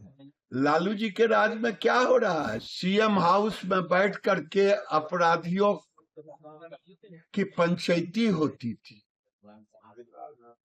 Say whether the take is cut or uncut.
cut